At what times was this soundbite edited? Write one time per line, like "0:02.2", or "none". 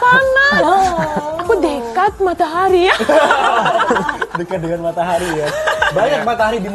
none